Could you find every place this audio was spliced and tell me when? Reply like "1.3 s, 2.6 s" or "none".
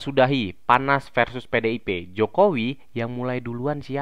none